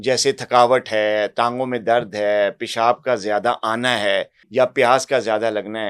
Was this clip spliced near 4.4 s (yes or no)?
yes